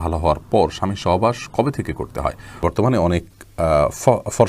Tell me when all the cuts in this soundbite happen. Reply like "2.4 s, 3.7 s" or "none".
2.6 s